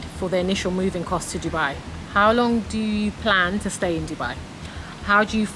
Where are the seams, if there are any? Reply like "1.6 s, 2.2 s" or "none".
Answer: 2.2 s, 4.8 s